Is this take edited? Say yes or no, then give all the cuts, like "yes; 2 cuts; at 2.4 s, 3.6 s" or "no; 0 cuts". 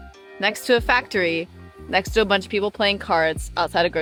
no; 0 cuts